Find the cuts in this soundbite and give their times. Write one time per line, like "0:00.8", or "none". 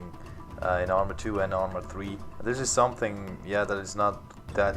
0:03.5